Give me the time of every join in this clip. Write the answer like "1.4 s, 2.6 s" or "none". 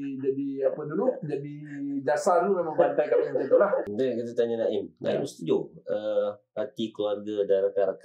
3.9 s